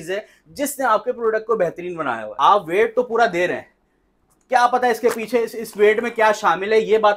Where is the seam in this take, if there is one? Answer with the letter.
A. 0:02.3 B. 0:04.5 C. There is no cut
A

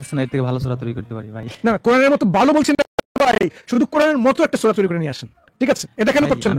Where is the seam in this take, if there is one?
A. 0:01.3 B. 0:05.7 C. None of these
C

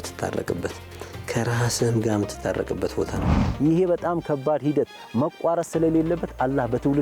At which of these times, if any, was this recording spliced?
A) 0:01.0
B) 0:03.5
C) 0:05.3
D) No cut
B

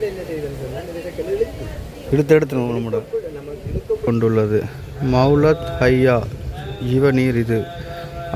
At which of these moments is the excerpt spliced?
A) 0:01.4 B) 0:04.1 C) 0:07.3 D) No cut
B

